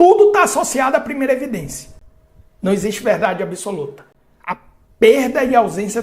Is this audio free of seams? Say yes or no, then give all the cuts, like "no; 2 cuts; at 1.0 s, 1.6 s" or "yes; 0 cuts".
yes; 0 cuts